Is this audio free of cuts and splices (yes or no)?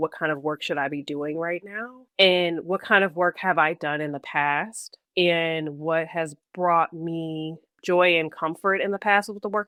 yes